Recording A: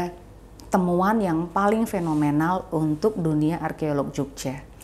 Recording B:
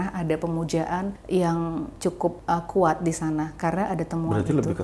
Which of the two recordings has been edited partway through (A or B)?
B